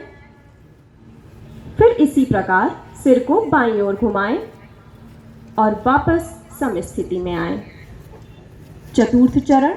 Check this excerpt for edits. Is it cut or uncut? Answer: uncut